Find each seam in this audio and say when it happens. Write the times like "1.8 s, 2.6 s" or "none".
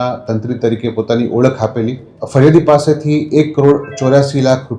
2.1 s